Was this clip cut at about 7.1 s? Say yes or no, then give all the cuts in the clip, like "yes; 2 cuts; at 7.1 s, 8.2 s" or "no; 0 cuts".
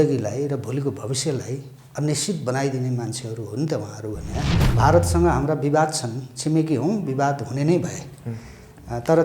no; 1 cut; at 4.6 s